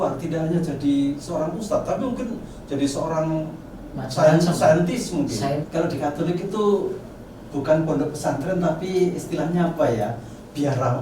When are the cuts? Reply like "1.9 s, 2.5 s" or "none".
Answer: 5.7 s